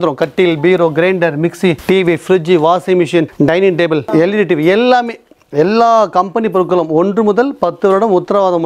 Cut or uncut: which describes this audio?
uncut